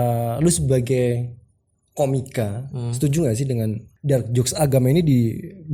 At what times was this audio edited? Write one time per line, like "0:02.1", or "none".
0:03.9